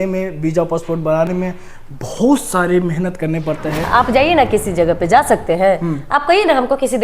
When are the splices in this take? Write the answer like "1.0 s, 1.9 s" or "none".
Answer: 3.8 s